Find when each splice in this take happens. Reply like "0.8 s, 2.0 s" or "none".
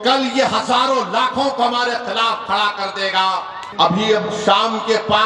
3.6 s